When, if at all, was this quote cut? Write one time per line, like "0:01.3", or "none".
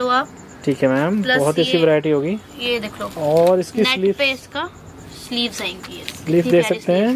none